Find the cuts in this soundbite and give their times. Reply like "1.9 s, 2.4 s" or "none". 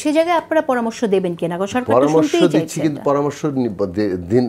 none